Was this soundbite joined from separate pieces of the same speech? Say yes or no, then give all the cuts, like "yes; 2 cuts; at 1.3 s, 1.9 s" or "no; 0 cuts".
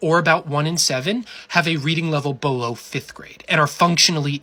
no; 0 cuts